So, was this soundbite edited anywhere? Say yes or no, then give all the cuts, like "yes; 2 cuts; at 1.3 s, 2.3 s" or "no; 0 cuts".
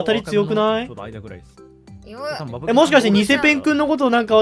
no; 0 cuts